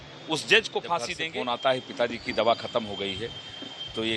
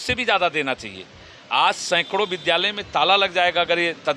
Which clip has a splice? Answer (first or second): first